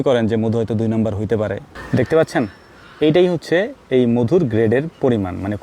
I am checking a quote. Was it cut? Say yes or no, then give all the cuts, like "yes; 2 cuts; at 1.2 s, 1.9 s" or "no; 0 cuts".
yes; 1 cut; at 1.7 s